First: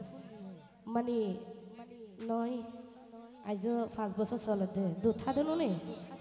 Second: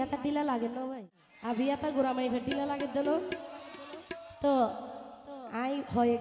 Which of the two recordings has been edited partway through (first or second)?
second